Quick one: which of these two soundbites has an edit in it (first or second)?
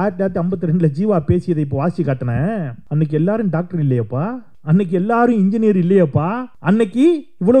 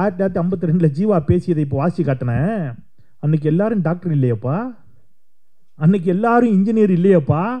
first